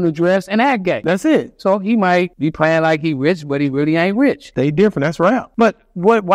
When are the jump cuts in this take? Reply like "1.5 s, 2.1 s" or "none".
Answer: 1.0 s, 2.3 s, 4.5 s, 5.5 s